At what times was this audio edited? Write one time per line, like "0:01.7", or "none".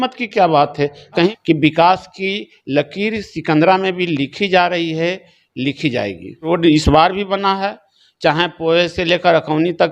0:01.3
0:06.4